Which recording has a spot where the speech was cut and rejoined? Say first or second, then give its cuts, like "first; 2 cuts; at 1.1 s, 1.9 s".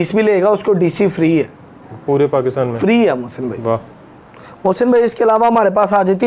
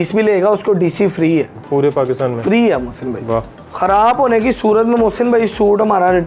second; 2 cuts; at 1.6 s, 3.6 s